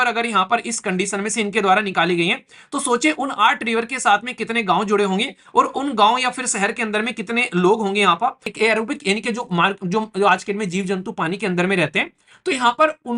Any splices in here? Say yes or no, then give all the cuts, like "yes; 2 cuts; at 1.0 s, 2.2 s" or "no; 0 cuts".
yes; 1 cut; at 8.5 s